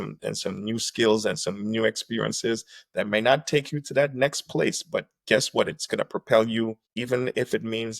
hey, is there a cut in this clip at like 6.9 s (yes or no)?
yes